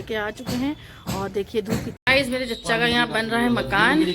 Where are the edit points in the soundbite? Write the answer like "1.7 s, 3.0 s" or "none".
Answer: 2.0 s